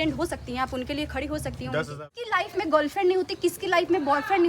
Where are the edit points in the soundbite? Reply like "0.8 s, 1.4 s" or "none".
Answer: 2.1 s